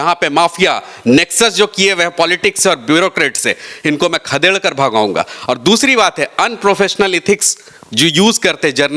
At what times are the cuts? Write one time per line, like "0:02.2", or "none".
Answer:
none